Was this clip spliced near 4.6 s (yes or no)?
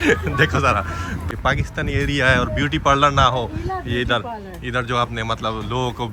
no